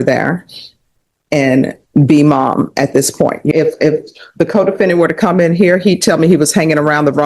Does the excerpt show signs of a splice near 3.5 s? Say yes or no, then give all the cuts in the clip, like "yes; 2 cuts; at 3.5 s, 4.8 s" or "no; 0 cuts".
yes; 1 cut; at 3.5 s